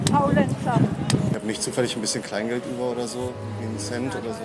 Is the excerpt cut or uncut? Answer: cut